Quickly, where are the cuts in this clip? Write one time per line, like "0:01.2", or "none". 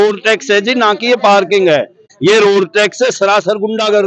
0:02.1